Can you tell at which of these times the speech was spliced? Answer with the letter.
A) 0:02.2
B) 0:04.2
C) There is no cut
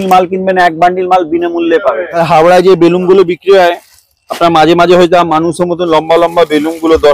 A